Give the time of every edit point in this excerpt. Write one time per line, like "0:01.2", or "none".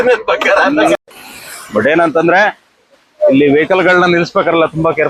0:01.0